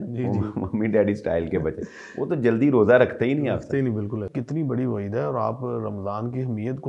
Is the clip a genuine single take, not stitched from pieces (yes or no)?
no